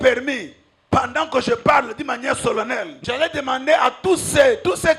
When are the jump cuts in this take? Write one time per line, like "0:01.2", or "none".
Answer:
0:00.9
0:03.0